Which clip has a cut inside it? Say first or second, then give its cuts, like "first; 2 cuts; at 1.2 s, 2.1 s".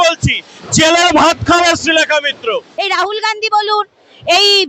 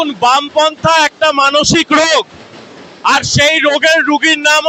first; 1 cut; at 2.7 s